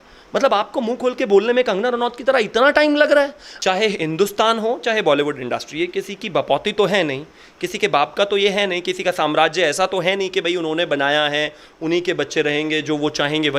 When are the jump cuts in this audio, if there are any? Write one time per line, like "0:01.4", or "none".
0:03.5

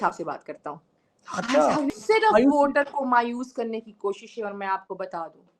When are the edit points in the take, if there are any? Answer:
0:01.9

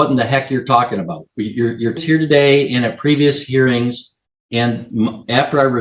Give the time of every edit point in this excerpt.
0:02.0

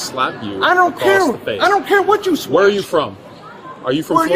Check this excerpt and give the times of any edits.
none

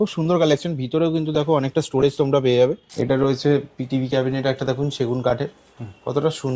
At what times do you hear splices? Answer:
0:02.8

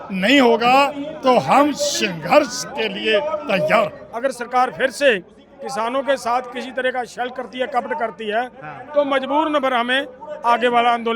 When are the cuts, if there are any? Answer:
0:04.0

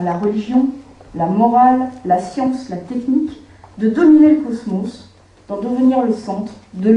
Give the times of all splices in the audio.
none

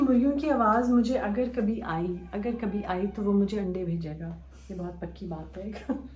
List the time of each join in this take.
none

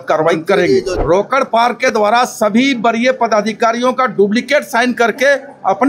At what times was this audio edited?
0:00.9

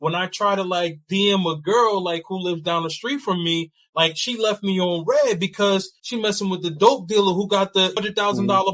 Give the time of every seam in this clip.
0:06.0
0:08.0

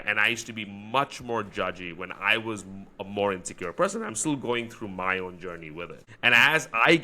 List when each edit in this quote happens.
0:06.0

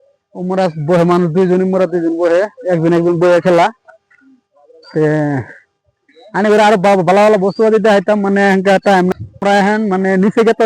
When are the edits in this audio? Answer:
0:09.1

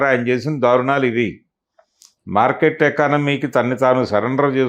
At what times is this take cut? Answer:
none

